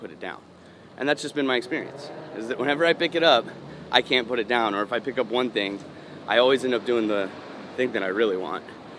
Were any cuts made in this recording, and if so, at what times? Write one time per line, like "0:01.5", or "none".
none